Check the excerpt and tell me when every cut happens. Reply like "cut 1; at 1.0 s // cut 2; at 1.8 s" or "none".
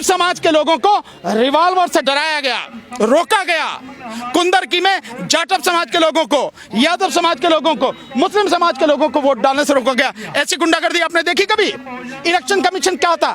none